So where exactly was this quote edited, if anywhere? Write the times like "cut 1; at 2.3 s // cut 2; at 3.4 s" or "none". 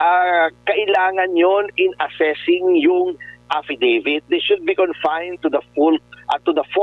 none